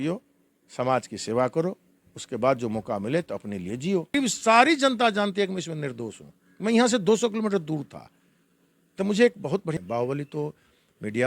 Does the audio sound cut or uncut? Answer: cut